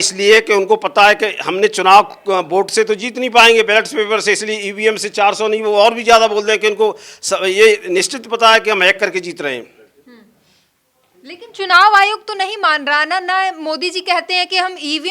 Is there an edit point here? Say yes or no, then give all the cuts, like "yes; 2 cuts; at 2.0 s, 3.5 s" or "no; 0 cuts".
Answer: no; 0 cuts